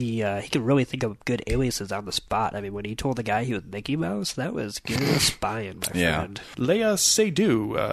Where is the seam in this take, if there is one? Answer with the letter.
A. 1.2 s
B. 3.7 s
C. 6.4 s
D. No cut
C